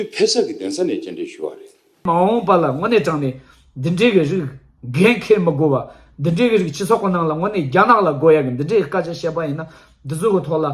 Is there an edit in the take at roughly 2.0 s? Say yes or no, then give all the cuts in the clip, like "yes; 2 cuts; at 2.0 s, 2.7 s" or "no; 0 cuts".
yes; 1 cut; at 2.0 s